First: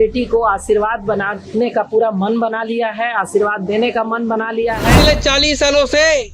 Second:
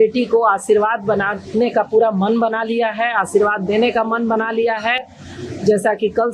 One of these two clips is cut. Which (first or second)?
first